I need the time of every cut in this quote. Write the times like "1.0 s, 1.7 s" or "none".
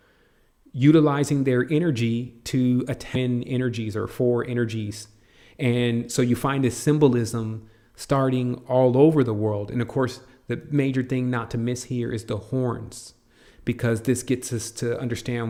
none